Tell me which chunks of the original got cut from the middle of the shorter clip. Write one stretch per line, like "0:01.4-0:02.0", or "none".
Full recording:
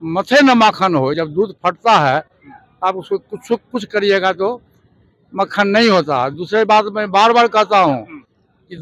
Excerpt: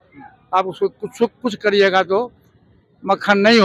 none